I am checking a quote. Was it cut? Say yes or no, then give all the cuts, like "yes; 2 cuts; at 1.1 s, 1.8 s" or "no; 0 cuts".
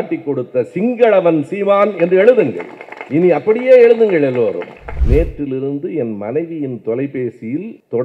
yes; 1 cut; at 4.9 s